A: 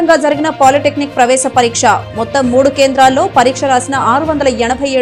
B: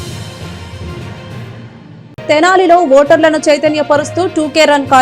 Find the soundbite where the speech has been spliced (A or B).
B